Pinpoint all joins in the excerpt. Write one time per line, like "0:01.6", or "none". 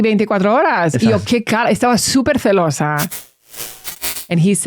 0:03.5